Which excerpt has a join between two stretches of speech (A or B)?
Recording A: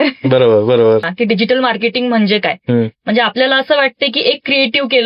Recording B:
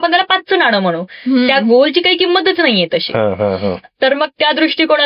A